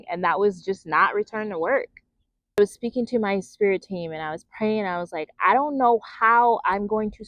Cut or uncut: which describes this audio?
cut